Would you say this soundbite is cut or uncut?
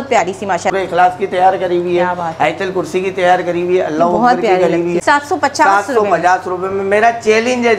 cut